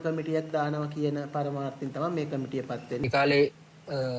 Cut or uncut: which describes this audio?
cut